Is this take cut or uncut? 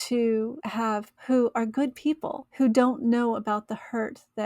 cut